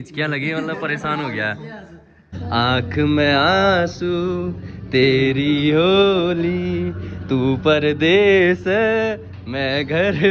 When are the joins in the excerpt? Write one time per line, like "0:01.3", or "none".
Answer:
0:02.4